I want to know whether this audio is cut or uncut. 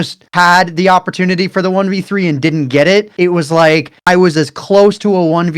uncut